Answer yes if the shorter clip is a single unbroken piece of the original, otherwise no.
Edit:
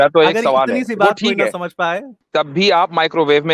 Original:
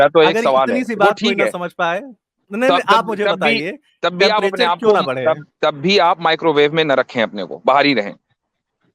no